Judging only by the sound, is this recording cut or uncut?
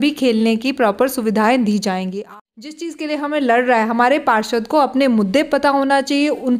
cut